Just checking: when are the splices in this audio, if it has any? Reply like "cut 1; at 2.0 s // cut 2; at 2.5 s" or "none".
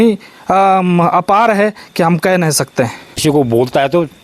cut 1; at 3.2 s